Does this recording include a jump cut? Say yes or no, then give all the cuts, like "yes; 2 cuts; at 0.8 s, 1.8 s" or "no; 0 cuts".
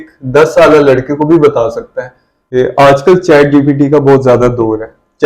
yes; 1 cut; at 2.4 s